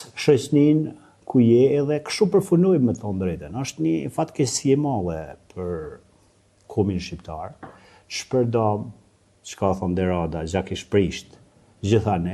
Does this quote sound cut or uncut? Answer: uncut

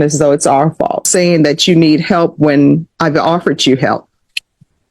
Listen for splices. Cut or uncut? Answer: cut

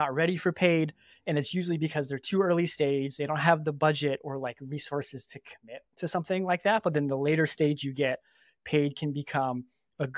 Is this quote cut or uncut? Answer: uncut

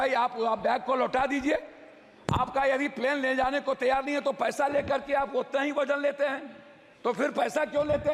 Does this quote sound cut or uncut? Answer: uncut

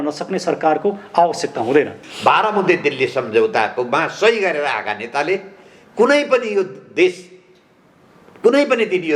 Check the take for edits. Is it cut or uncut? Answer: cut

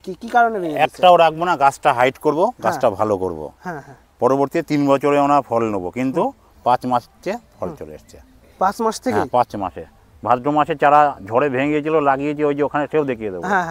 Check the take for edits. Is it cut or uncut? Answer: uncut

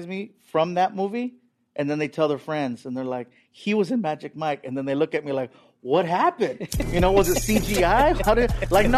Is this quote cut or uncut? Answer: uncut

